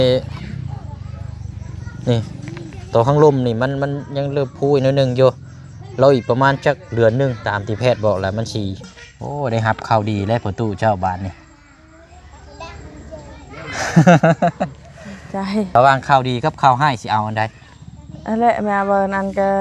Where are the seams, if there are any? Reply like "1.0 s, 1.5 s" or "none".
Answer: 8.8 s, 15.7 s